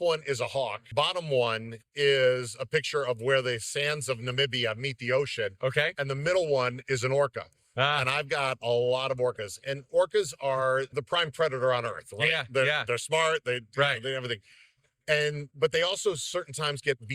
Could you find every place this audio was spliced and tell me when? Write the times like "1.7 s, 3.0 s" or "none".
0.9 s, 10.9 s